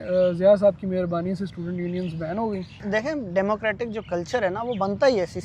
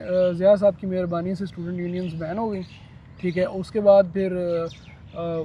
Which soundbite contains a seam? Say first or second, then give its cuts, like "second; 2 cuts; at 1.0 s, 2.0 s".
first; 1 cut; at 2.9 s